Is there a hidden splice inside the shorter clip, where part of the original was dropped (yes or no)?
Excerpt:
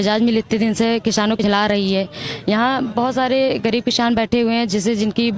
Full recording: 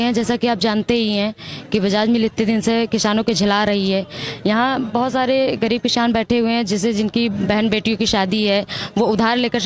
yes